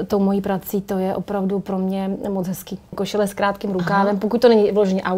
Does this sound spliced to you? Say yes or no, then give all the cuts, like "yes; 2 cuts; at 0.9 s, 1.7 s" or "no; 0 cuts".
yes; 1 cut; at 3.0 s